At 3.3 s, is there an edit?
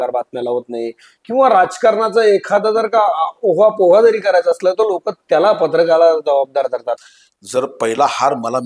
no; 1 cut; at 7.0 s

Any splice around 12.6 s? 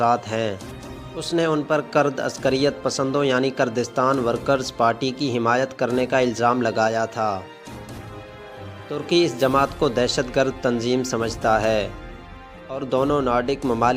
no; 2 cuts; at 7.6 s, 8.9 s

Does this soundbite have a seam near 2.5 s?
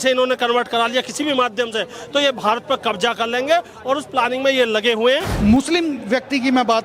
no; 1 cut; at 5.3 s

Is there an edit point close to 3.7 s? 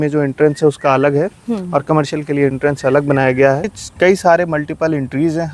yes; 1 cut; at 3.7 s

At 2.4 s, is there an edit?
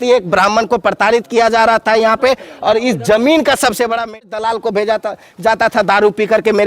no; 1 cut; at 4.3 s

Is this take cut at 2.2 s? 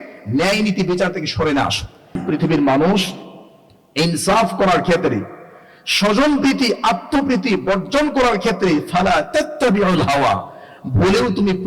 yes; 1 cut; at 2.2 s

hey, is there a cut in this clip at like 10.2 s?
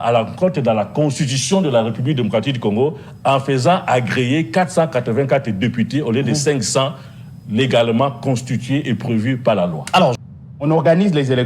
yes; 1 cut; at 10.2 s

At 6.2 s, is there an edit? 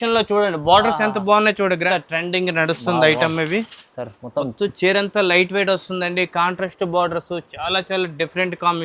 no; 1 cut; at 1.8 s

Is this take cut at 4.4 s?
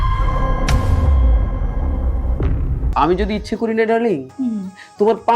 no; 1 cut; at 2.8 s

